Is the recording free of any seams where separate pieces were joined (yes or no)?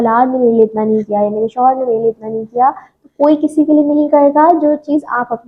yes